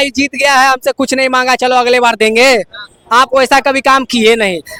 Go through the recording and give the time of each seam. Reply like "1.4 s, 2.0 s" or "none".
none